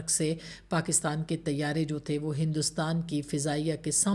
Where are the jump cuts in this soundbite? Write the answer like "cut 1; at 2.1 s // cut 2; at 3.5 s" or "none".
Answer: none